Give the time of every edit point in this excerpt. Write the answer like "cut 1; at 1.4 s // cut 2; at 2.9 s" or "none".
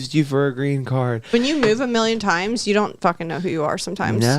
cut 1; at 1.3 s